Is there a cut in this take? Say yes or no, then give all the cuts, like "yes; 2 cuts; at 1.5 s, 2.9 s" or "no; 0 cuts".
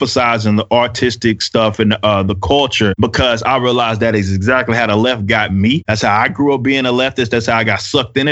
yes; 2 cuts; at 2.9 s, 5.9 s